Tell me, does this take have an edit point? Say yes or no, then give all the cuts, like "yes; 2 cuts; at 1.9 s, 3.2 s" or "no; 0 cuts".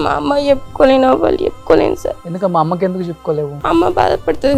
yes; 2 cuts; at 2.3 s, 3.6 s